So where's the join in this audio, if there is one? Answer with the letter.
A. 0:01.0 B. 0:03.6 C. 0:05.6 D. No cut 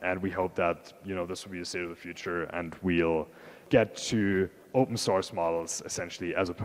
B